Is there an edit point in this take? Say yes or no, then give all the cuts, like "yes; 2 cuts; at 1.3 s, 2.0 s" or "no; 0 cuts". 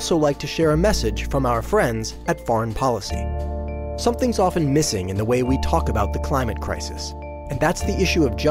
no; 0 cuts